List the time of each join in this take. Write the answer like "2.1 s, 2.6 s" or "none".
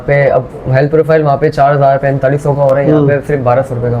none